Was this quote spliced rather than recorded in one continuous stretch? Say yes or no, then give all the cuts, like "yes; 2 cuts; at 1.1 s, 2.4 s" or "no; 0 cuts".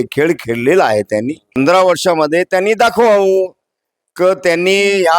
yes; 1 cut; at 1.6 s